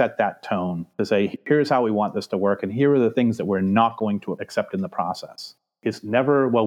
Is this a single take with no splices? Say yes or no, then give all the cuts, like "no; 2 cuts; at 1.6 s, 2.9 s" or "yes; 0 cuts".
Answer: no; 2 cuts; at 1.4 s, 5.7 s